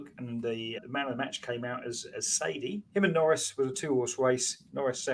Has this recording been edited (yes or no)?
yes